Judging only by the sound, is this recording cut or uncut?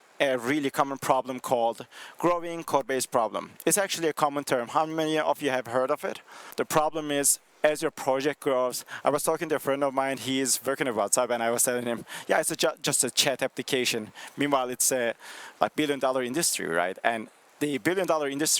cut